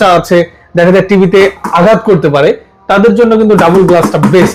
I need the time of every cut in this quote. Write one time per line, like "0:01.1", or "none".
none

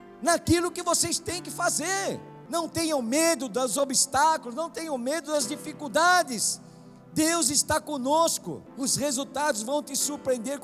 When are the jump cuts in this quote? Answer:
0:02.3
0:08.7

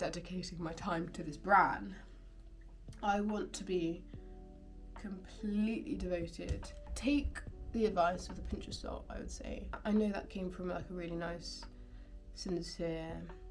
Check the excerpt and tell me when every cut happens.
0:06.9
0:09.8

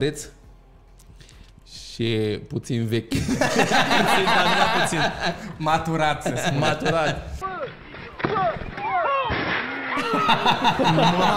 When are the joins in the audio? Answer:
0:07.4

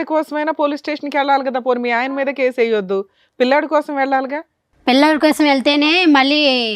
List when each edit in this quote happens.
none

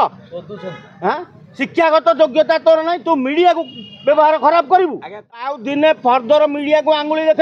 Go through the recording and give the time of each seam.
0:05.6

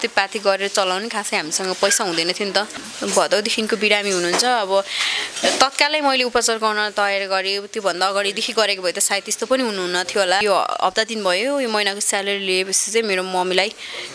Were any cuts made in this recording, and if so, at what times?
0:02.8
0:10.4

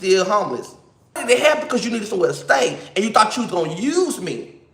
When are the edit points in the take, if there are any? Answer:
0:01.2

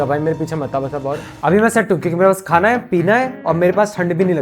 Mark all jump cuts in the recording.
0:01.3

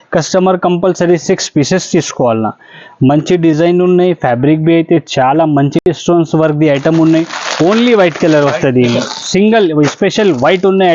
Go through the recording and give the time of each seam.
0:05.8

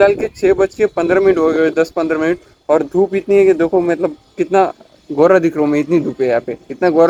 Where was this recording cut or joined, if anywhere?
none

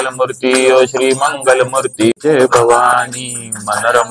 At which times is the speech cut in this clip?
0:02.2

